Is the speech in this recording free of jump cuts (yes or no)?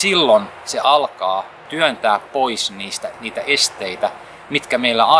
no